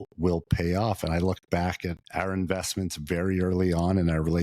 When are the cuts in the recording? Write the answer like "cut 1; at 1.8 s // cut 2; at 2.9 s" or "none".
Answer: cut 1; at 2.0 s